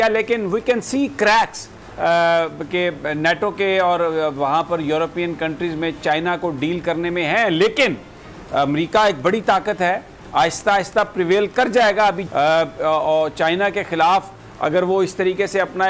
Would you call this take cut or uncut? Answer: cut